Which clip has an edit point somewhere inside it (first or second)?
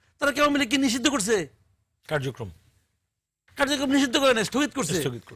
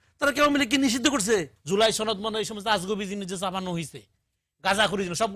second